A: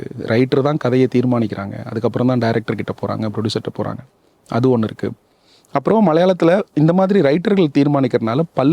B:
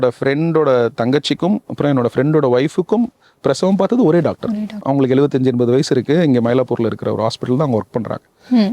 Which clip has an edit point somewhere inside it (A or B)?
B